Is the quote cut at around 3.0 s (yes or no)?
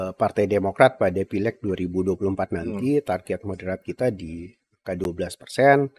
no